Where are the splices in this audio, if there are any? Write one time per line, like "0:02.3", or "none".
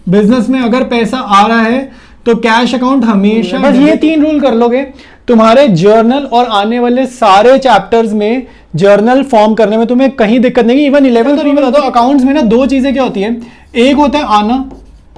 0:03.6
0:11.6